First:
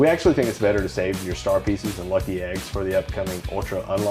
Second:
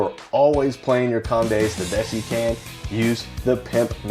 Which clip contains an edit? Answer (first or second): second